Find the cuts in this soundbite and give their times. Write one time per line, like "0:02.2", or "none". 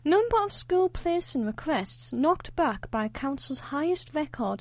none